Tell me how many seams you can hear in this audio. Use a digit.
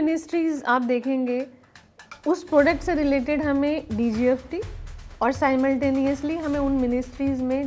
0